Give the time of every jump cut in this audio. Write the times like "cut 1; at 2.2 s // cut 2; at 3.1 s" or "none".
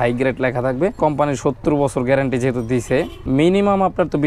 cut 1; at 0.9 s // cut 2; at 3.2 s